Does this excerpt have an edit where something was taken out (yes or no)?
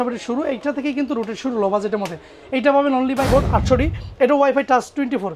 yes